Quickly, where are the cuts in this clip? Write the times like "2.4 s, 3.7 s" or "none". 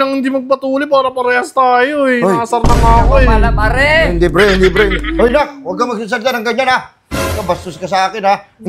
none